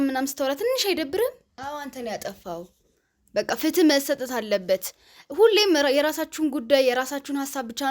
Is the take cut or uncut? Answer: cut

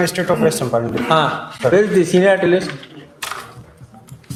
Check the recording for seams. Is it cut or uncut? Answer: uncut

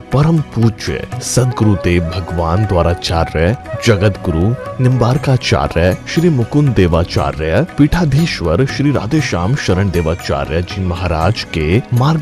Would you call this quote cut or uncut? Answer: uncut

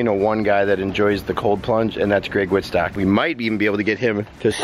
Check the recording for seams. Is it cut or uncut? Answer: cut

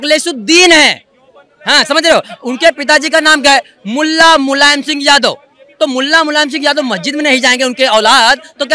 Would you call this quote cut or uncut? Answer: uncut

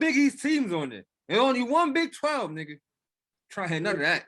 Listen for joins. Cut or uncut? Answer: uncut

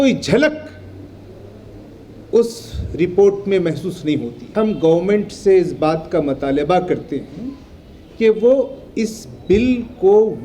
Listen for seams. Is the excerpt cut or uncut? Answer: cut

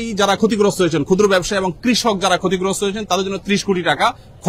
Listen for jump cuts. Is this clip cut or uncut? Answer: uncut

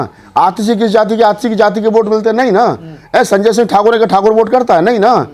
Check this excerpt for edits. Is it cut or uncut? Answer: uncut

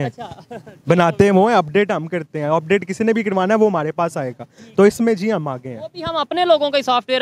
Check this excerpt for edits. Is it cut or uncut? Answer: uncut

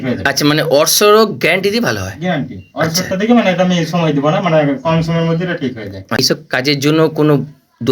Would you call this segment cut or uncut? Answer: cut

